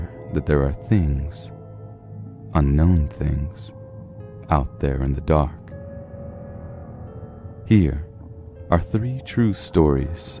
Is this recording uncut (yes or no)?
yes